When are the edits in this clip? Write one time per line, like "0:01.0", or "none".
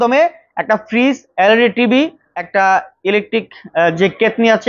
0:02.6

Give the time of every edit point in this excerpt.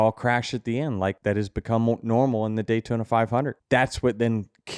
0:01.2
0:03.6

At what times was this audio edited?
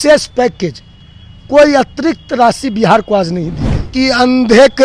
0:03.9

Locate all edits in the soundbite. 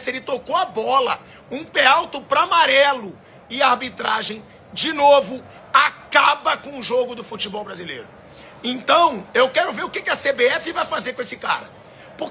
none

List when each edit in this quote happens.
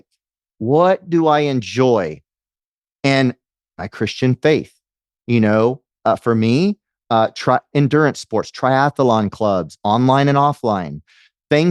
none

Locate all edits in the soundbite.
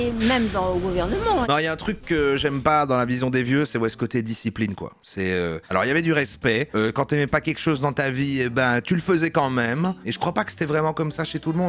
0:01.5
0:10.0

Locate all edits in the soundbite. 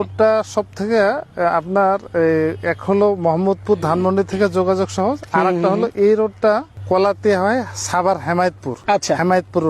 0:06.7
0:08.7

